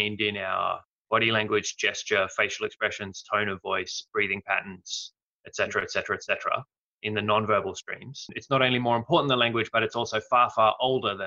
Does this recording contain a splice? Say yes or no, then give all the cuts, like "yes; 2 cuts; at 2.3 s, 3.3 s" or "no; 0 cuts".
yes; 2 cuts; at 0.9 s, 8.3 s